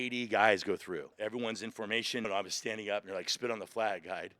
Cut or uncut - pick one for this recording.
cut